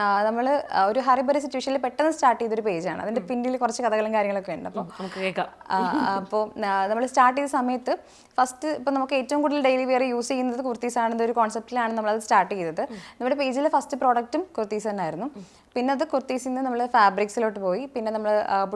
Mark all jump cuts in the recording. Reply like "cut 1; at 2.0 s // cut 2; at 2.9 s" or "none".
none

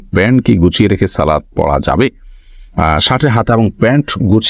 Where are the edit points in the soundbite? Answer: none

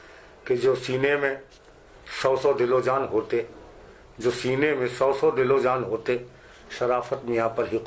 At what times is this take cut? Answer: none

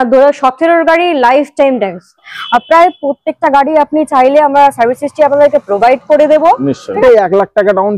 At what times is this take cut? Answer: cut 1; at 2.3 s // cut 2; at 7.0 s

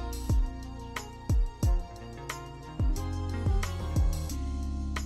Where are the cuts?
cut 1; at 1.8 s

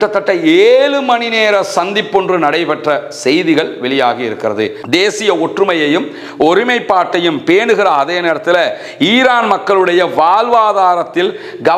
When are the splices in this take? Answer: cut 1; at 4.8 s

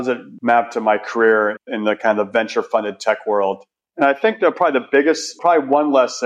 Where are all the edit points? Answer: none

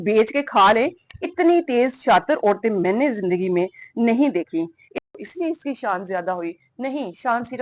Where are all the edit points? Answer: cut 1; at 5.0 s

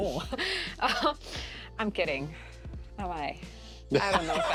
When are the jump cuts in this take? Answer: none

